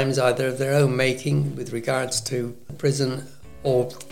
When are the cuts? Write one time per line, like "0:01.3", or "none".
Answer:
0:02.7